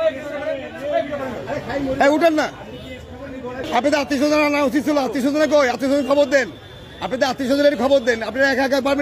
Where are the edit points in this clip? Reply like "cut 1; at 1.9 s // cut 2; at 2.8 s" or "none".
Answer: cut 1; at 3.6 s